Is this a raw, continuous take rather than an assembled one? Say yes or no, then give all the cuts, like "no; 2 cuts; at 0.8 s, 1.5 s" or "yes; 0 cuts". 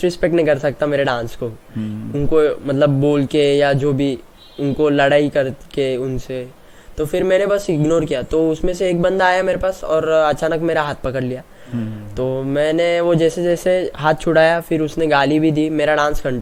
yes; 0 cuts